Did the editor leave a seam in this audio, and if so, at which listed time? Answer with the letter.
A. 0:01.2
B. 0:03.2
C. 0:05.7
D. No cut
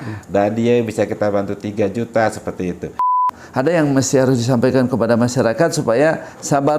B